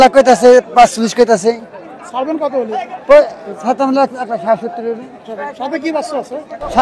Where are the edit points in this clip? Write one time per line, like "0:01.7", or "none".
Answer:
none